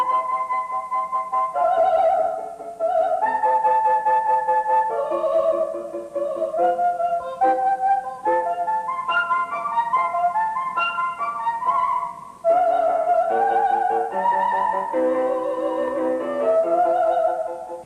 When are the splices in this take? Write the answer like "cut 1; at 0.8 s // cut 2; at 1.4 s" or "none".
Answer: cut 1; at 8.5 s